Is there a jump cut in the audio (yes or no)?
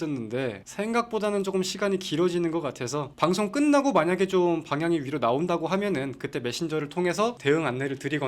no